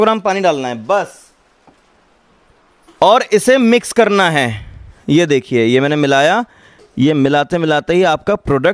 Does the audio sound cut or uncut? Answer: uncut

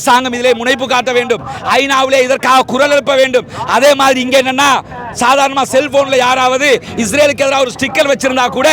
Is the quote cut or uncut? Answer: uncut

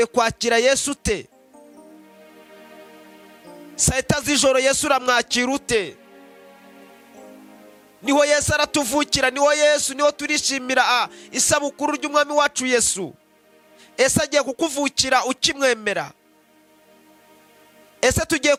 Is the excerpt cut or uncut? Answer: uncut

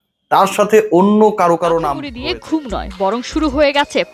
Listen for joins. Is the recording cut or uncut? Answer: cut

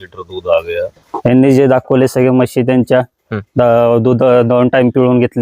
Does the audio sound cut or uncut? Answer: cut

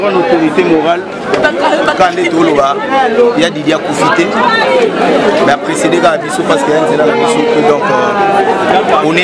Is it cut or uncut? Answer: cut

